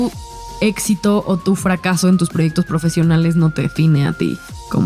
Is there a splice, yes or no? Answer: no